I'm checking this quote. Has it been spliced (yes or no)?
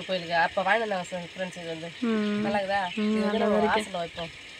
no